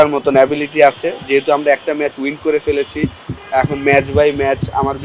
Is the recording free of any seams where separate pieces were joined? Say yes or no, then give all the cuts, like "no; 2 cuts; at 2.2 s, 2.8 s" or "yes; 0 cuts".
yes; 0 cuts